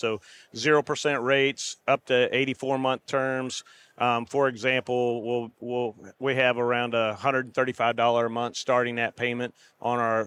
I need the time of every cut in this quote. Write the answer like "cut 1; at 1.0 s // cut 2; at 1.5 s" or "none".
none